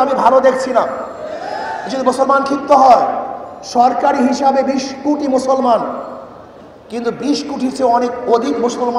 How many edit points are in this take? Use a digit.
0